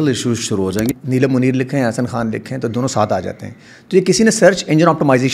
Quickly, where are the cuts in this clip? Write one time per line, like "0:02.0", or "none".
0:00.9

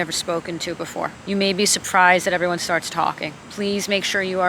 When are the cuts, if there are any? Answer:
0:01.2
0:03.4

